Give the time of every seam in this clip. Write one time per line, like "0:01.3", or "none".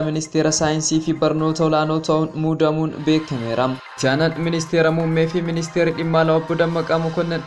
0:04.0

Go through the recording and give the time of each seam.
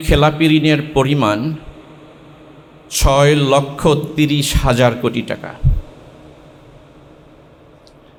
none

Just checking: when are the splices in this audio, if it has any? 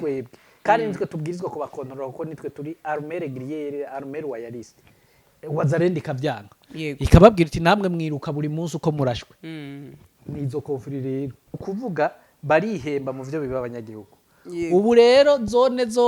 0:11.5

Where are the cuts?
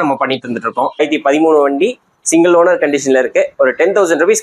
0:01.0

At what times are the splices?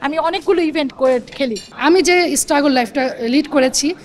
0:01.7

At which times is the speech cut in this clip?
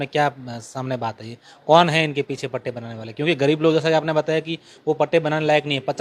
none

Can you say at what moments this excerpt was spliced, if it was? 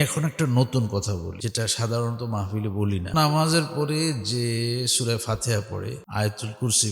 0:01.4
0:03.1
0:06.0

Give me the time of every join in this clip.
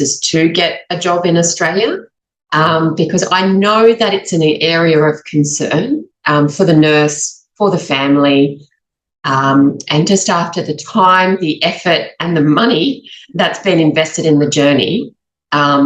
none

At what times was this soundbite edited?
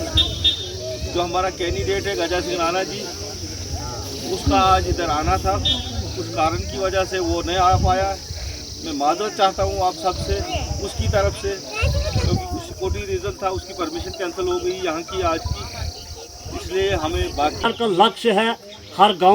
0:17.6

